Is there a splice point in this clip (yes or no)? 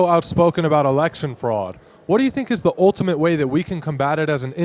no